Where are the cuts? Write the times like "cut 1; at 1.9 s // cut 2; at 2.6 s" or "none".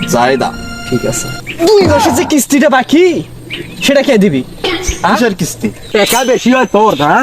cut 1; at 1.2 s // cut 2; at 5.8 s